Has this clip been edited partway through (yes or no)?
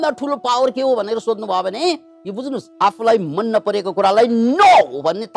no